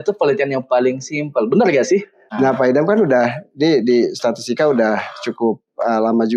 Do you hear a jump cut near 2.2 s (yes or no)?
yes